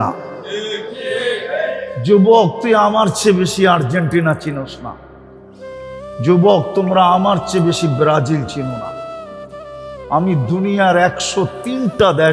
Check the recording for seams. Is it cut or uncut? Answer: uncut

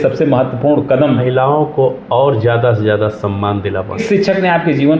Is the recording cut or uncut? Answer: cut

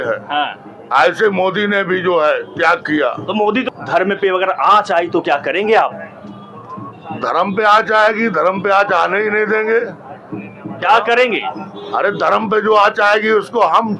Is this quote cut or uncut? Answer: cut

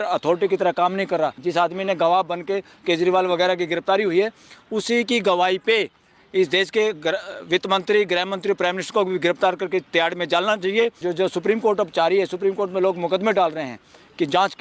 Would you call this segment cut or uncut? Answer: cut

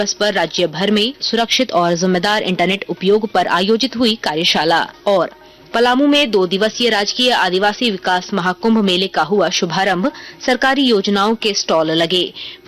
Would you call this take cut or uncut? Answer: uncut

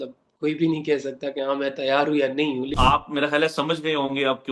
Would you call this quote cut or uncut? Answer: cut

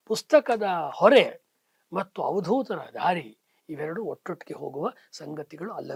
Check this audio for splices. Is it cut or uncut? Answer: uncut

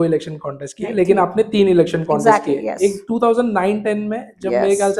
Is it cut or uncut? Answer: uncut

